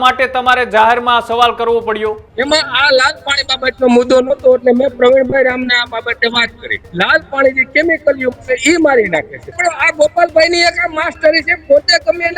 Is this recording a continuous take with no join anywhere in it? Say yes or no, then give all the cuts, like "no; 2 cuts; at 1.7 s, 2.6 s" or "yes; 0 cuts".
no; 3 cuts; at 2.3 s, 6.8 s, 9.5 s